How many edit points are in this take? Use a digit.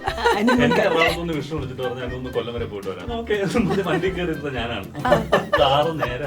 1